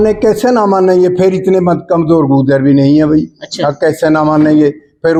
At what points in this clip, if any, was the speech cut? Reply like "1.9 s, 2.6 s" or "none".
none